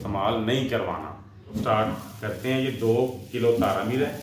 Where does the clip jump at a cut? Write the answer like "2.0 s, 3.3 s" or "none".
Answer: 1.5 s